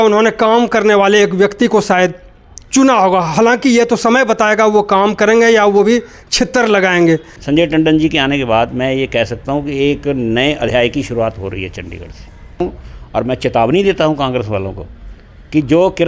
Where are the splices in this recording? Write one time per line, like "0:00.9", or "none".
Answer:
0:07.4
0:12.6